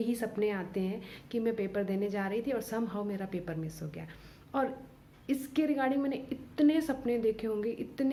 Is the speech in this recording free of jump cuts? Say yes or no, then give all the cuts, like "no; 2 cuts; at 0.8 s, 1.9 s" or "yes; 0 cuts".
yes; 0 cuts